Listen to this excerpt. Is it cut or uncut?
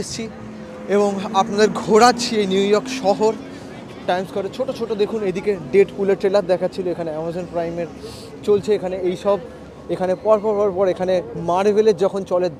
uncut